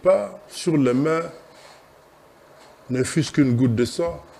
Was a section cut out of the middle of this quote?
no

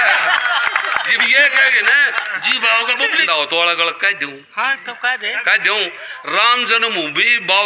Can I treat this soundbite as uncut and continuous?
no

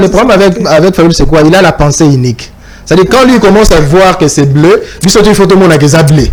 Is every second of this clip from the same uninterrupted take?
yes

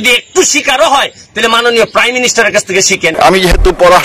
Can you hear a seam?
yes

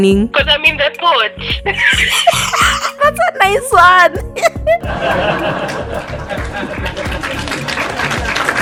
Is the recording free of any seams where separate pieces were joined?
yes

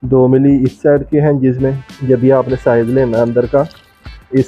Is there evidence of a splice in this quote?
yes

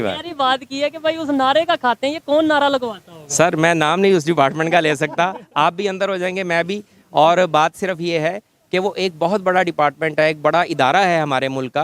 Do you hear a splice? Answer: no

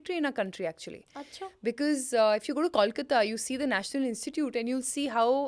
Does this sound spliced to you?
no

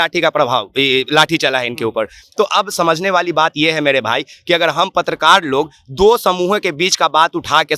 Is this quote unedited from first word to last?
yes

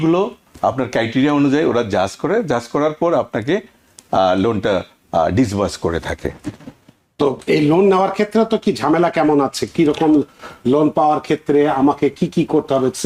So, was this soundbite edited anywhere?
no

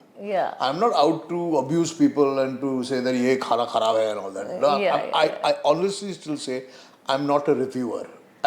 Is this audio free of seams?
yes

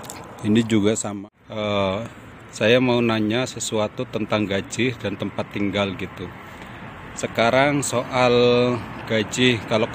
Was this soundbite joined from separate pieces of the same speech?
yes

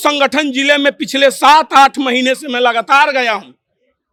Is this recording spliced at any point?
no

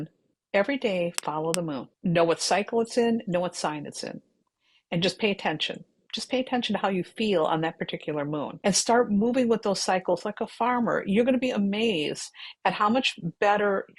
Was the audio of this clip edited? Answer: yes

